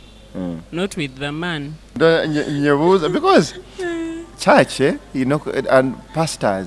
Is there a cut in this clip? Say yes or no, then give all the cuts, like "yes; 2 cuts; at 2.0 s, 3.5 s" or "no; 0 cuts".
yes; 1 cut; at 2.0 s